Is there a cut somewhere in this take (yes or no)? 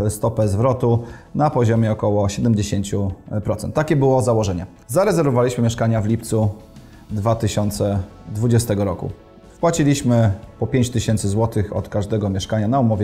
no